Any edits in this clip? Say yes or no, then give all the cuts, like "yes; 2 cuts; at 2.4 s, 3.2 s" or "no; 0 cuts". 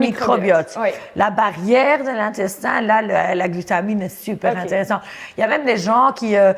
no; 0 cuts